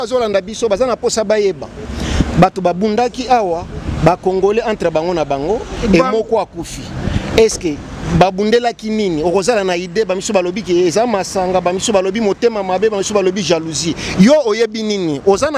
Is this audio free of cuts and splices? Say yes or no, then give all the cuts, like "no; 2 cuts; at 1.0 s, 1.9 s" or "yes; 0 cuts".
yes; 0 cuts